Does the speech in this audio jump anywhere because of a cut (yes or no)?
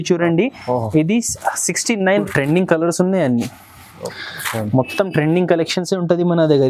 yes